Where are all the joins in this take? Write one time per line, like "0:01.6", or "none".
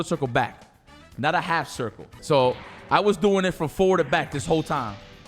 0:02.1